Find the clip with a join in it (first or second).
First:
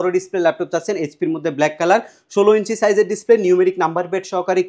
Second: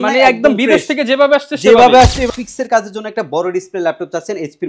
second